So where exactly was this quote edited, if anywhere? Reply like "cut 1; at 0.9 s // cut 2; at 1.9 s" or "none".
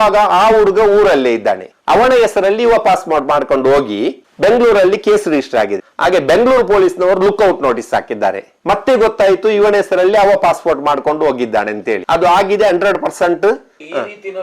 none